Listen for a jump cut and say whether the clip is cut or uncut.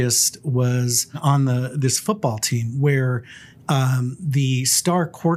cut